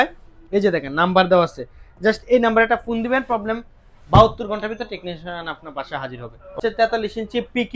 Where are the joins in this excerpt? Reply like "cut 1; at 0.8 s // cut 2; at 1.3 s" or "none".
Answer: cut 1; at 6.5 s